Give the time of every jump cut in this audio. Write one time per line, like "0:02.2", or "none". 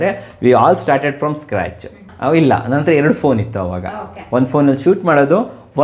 0:02.0